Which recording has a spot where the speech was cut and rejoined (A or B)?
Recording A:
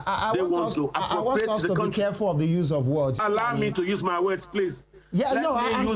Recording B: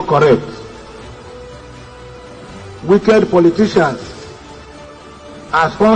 A